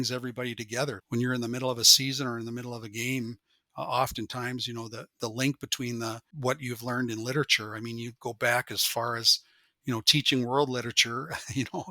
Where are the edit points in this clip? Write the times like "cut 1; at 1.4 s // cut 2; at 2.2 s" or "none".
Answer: cut 1; at 1.0 s // cut 2; at 6.3 s